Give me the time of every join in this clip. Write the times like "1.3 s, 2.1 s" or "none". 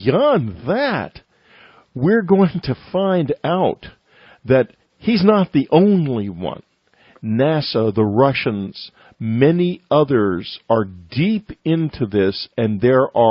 2.3 s